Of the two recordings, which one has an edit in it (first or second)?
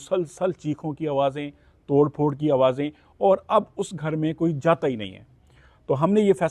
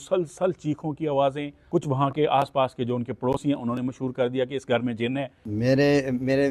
second